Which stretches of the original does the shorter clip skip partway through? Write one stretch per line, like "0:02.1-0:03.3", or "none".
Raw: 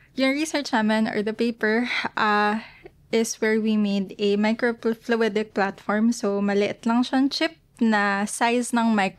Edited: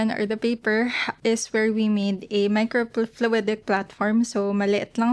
0:02.0-0:02.9

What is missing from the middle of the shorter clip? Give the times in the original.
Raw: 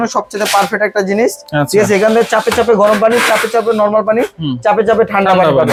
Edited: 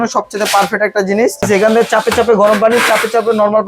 0:01.5-0:01.9

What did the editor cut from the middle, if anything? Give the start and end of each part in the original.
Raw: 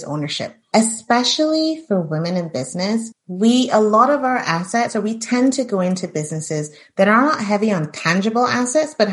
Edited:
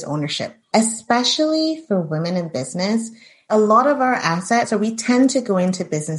0:03.4-0:03.6

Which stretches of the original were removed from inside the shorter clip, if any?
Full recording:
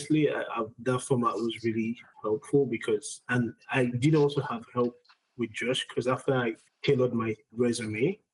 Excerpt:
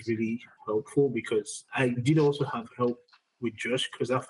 0:03.2-0:03.6

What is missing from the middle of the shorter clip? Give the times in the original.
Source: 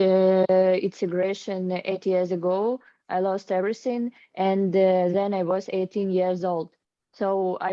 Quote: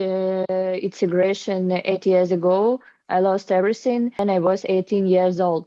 0:04.2-0:05.3

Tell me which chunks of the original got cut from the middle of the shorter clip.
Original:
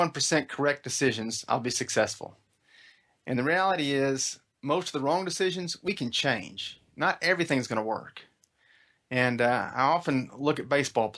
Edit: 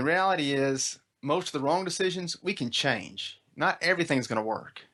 none

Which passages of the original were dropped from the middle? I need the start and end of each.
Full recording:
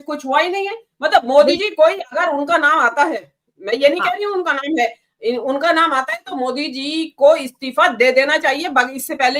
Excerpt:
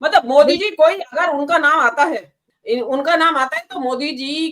0:03.5-0:05.1

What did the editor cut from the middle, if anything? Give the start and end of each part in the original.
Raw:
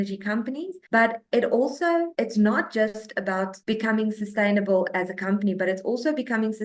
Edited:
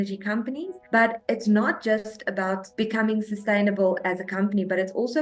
0:01.2-0:02.1

